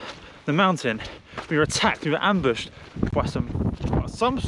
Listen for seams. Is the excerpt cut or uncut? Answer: uncut